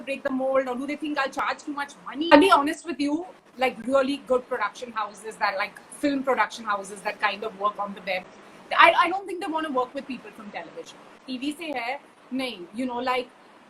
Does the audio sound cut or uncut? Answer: cut